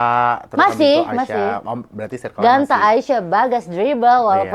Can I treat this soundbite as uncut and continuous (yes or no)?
yes